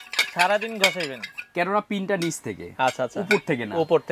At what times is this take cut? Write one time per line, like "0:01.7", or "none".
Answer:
none